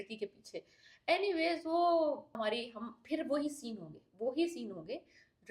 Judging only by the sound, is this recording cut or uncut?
cut